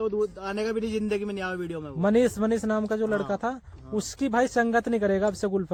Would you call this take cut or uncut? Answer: uncut